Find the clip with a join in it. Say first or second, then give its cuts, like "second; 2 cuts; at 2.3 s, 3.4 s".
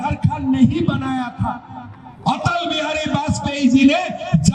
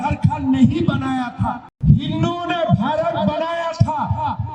second; 1 cut; at 1.7 s